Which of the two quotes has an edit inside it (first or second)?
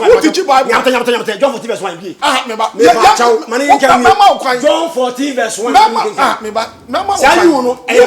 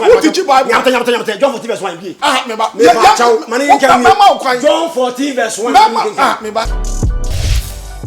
second